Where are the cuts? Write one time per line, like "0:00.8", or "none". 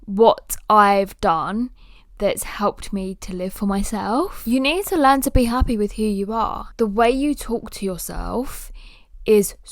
0:04.4
0:06.6

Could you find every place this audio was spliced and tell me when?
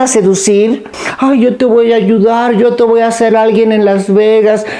0:00.9

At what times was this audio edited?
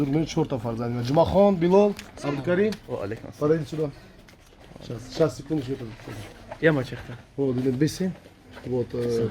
none

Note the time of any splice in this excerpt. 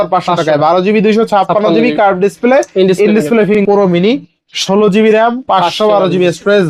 0:03.6

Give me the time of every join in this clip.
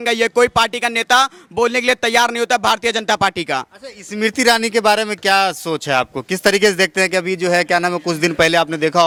none

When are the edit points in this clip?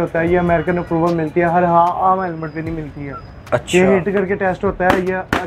none

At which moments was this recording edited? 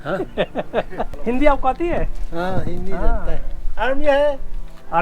0:01.1

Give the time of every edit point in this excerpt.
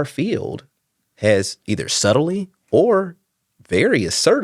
none

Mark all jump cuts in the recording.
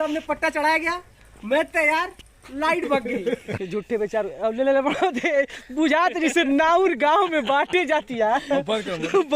0:03.5

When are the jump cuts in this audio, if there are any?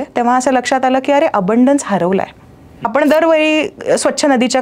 0:02.8

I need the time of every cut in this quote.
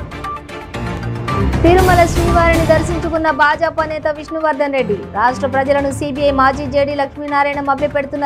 none

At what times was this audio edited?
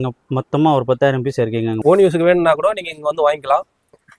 0:01.8

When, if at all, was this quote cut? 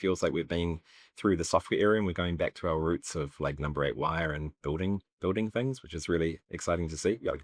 none

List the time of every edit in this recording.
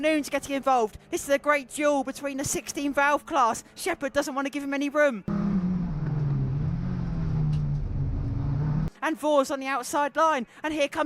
0:05.3

